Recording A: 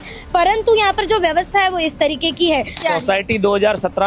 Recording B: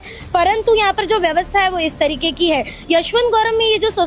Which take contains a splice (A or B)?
A